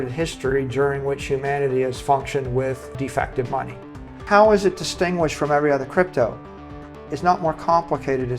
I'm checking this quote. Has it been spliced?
yes; 2 cuts; at 2.9 s, 4.1 s

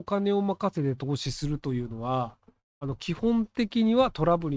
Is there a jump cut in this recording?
no; 0 cuts

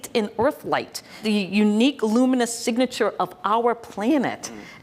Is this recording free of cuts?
no; 1 cut; at 1.2 s

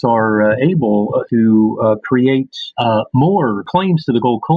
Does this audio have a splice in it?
yes; 3 cuts; at 1.2 s, 2.6 s, 3.7 s

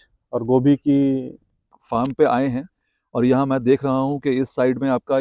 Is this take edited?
yes; 1 cut; at 1.8 s

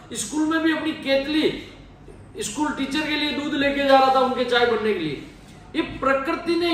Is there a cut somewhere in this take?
no; 0 cuts

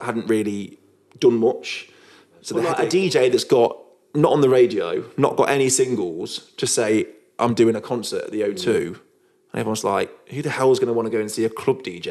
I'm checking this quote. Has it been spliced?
yes; 1 cut; at 2.7 s

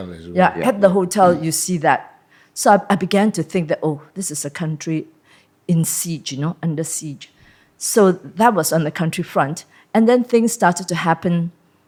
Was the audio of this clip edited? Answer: no; 0 cuts

